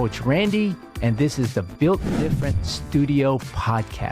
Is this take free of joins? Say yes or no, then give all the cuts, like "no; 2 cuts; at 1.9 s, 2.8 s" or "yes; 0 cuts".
yes; 0 cuts